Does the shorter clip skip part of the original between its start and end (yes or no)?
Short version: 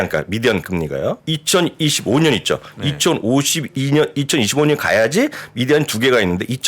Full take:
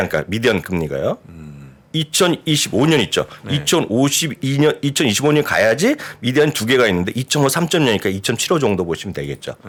yes